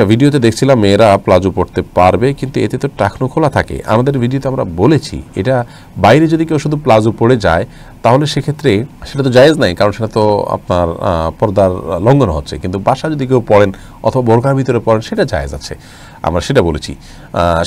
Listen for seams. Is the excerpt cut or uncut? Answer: uncut